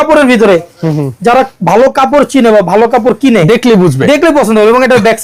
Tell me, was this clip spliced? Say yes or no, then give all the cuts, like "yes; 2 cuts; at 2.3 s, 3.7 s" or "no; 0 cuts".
no; 0 cuts